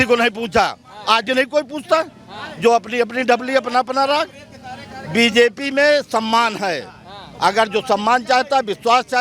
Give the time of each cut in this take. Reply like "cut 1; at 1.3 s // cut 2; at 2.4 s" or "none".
none